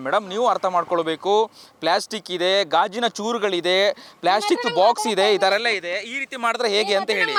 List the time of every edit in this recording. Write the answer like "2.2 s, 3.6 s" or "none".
none